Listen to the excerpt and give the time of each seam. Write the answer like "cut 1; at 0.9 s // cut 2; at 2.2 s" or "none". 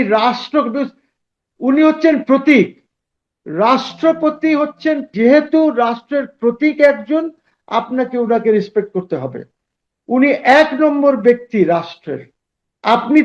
cut 1; at 5.1 s

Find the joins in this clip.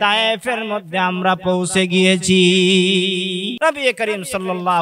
cut 1; at 3.5 s

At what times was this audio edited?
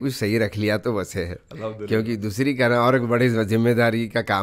none

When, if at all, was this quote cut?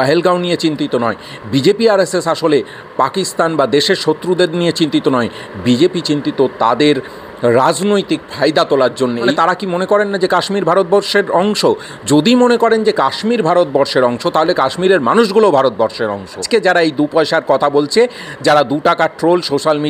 cut 1; at 9.3 s // cut 2; at 16.4 s

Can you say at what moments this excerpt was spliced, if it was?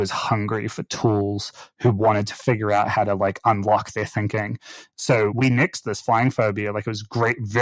cut 1; at 5.3 s

